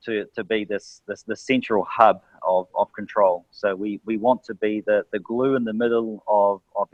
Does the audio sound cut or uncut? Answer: uncut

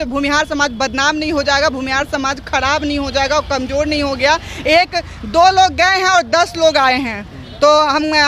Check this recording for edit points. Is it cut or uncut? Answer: uncut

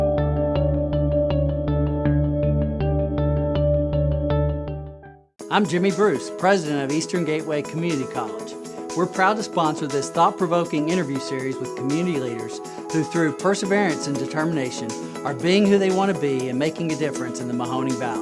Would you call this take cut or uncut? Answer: uncut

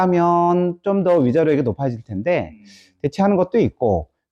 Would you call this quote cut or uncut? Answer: uncut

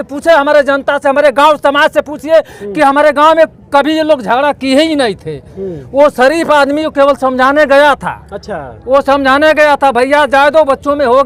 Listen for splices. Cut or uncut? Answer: uncut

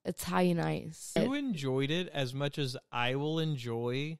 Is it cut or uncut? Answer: cut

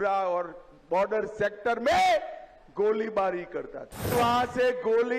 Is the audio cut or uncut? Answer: cut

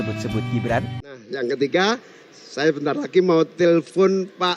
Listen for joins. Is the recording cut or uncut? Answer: cut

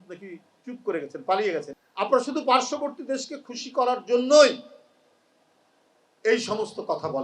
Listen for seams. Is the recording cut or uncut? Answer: cut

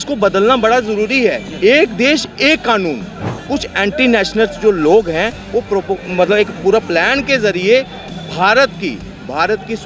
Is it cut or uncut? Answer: cut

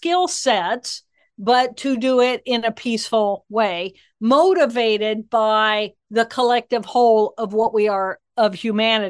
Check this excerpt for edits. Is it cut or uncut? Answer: uncut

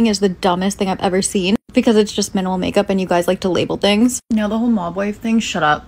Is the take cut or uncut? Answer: uncut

